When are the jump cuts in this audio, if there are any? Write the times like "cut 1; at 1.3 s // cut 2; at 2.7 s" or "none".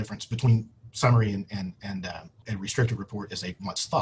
cut 1; at 2.3 s